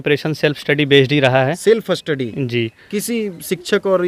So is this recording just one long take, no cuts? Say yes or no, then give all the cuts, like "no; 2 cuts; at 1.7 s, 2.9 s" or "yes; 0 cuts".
yes; 0 cuts